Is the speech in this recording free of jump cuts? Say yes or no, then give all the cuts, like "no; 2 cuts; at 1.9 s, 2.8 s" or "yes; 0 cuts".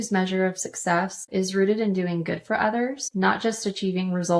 no; 2 cuts; at 1.2 s, 3.0 s